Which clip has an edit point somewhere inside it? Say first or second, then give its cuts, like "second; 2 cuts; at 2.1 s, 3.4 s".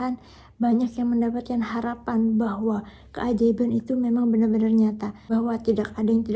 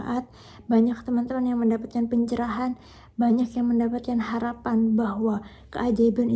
first; 1 cut; at 5.1 s